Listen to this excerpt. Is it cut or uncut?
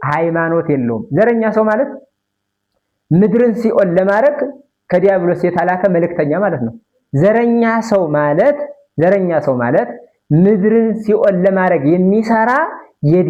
uncut